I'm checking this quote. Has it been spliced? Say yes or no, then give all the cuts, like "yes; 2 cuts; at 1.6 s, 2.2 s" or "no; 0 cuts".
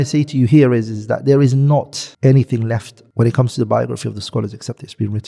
no; 0 cuts